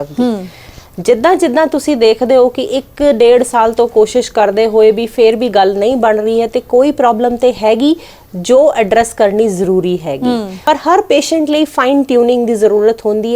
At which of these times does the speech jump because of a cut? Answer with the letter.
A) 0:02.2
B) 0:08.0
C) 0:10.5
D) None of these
C